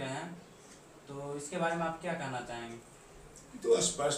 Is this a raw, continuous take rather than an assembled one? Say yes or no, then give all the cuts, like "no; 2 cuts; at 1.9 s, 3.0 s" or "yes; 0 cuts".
yes; 0 cuts